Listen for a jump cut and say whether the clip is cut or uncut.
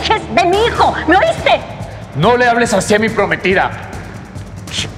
uncut